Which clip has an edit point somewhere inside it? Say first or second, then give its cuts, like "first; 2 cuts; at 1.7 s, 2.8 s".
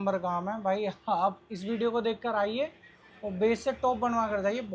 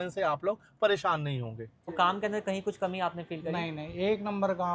second; 1 cut; at 1.9 s